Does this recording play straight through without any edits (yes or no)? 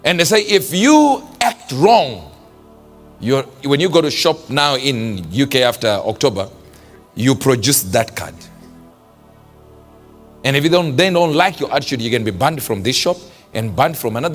no